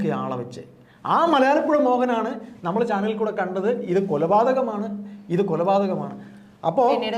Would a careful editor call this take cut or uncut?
uncut